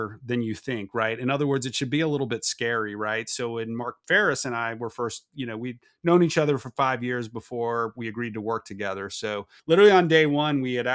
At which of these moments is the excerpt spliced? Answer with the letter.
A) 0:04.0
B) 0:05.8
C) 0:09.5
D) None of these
C